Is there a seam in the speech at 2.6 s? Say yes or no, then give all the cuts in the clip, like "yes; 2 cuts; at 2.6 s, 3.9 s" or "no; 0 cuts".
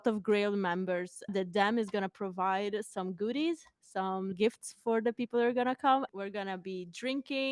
no; 3 cuts; at 1.3 s, 4.3 s, 6.1 s